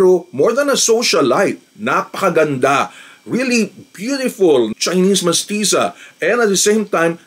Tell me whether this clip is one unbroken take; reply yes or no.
yes